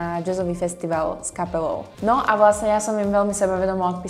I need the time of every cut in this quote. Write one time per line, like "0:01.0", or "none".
0:01.9